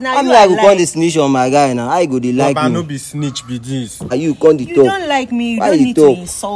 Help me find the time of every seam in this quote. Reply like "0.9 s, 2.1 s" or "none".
4.1 s